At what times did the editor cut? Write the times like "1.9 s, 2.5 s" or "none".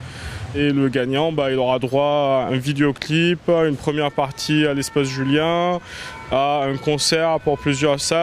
3.4 s